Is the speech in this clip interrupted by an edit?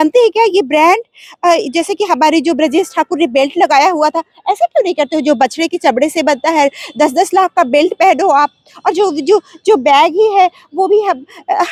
no; 0 cuts

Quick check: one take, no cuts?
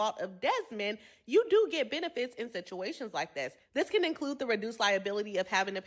yes; 0 cuts

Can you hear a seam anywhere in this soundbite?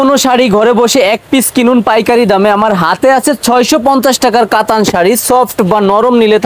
no; 0 cuts

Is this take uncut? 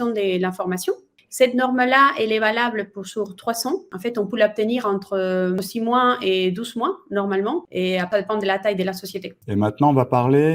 no; 4 cuts; at 3.9 s, 5.6 s, 8.0 s, 9.3 s

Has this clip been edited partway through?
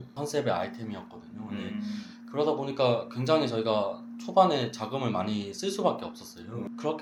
no; 0 cuts

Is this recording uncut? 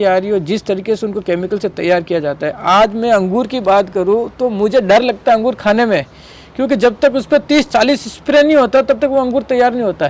yes; 0 cuts

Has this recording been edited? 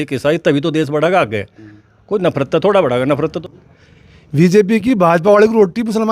yes; 1 cut; at 3.4 s

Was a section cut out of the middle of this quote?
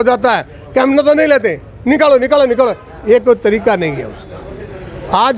no; 0 cuts

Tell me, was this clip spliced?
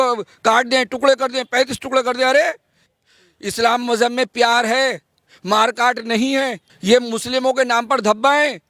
yes; 2 cuts; at 2.9 s, 6.7 s

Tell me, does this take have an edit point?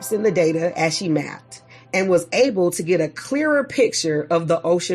no; 0 cuts

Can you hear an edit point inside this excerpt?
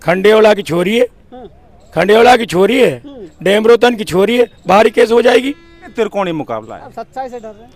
yes; 1 cut; at 5.9 s

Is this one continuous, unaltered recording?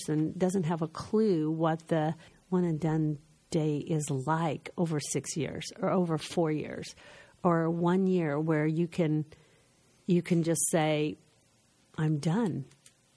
no; 1 cut; at 2.3 s

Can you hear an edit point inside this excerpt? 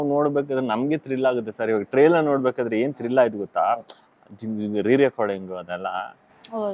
no; 0 cuts

